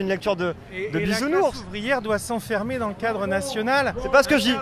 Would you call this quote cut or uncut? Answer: uncut